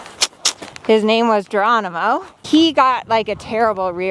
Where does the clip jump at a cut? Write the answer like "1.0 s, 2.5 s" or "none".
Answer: 2.4 s